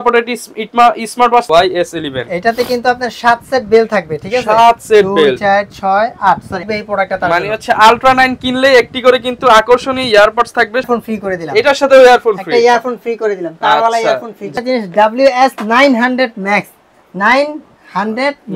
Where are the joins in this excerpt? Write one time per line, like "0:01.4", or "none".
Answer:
0:01.5
0:06.7
0:10.9
0:14.5